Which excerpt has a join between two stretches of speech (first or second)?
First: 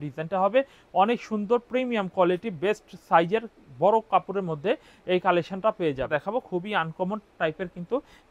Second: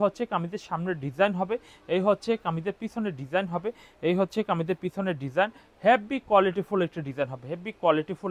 first